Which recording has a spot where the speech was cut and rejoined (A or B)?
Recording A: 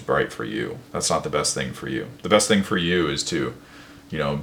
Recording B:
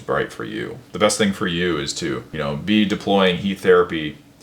B